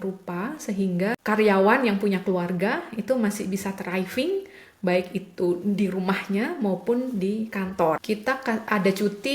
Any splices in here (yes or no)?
yes